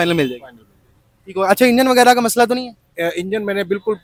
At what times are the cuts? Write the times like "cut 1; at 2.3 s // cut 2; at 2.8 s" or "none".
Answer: none

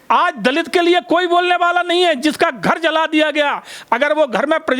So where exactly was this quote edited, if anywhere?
none

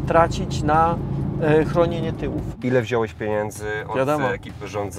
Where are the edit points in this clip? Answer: cut 1; at 2.5 s

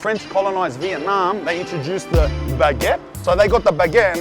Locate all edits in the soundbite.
cut 1; at 3.1 s

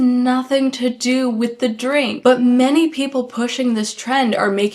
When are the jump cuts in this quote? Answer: cut 1; at 2.1 s

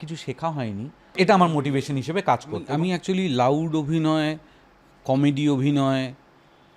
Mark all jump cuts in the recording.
cut 1; at 1.2 s // cut 2; at 2.7 s

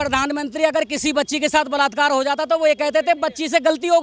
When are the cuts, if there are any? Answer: none

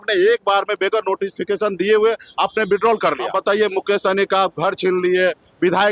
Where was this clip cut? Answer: cut 1; at 3.3 s

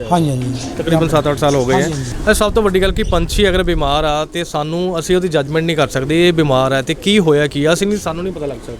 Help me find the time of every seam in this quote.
cut 1; at 2.1 s

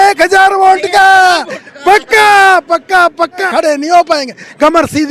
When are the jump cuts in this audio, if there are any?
cut 1; at 3.5 s

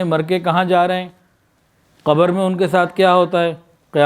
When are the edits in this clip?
none

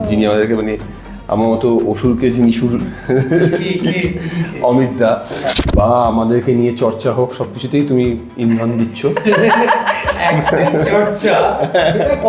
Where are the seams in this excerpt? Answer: cut 1; at 5.5 s

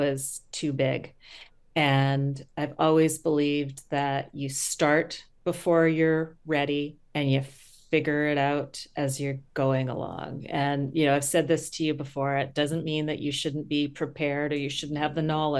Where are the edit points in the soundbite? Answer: cut 1; at 5.2 s // cut 2; at 7.0 s

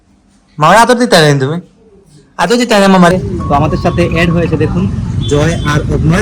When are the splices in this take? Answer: cut 1; at 3.1 s

